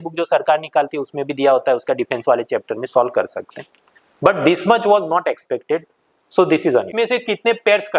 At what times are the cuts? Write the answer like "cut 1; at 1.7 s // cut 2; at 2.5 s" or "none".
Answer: cut 1; at 6.9 s